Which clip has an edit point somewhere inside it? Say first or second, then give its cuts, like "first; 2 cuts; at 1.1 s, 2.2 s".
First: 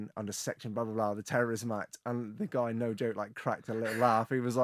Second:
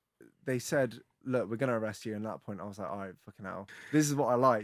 second; 1 cut; at 3.7 s